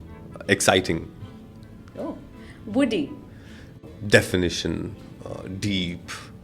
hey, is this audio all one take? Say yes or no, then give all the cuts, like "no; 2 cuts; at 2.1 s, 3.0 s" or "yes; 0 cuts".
no; 1 cut; at 3.8 s